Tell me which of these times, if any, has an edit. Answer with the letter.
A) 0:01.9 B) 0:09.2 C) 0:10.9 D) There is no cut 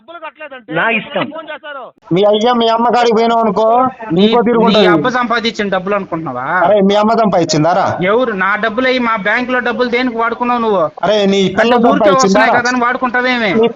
A